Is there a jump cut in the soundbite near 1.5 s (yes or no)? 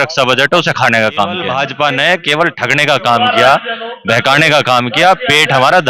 yes